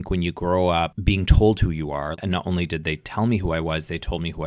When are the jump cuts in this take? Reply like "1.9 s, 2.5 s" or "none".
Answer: 2.1 s